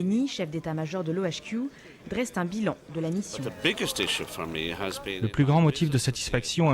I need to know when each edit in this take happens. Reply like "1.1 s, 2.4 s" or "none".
3.4 s, 5.2 s